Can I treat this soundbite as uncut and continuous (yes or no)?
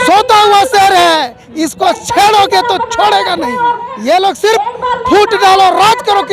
no